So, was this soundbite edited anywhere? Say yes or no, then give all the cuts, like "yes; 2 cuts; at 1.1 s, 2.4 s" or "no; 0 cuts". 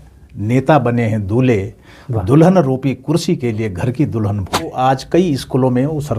yes; 1 cut; at 4.7 s